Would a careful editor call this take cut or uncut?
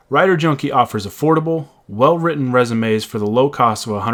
uncut